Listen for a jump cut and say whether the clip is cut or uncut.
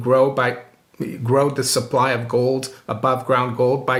uncut